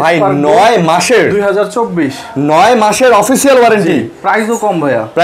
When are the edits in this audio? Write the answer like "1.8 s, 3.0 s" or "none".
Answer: none